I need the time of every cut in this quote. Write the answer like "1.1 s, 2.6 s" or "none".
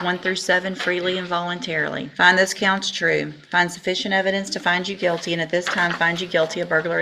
2.1 s